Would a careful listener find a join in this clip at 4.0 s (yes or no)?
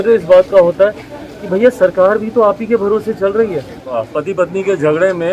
yes